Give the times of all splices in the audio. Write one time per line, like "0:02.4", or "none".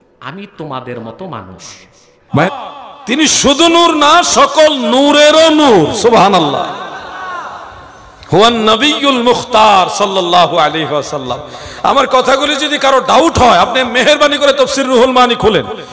0:02.4